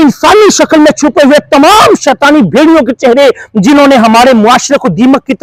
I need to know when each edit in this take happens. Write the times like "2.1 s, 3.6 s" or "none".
none